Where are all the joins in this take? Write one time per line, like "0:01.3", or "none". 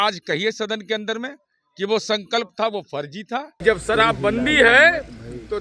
0:03.5